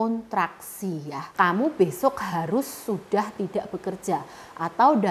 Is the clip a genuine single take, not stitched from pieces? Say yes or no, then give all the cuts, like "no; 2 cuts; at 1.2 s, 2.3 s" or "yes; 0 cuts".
no; 1 cut; at 1.3 s